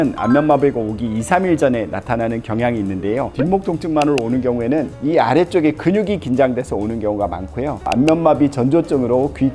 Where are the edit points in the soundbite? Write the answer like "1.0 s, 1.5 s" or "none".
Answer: 3.3 s

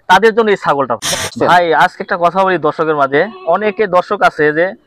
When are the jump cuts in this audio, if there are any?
1.3 s

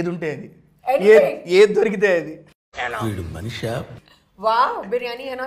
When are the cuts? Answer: none

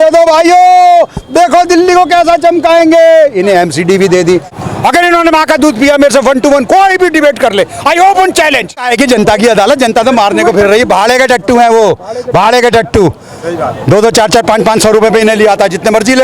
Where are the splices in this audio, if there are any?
4.5 s, 8.9 s

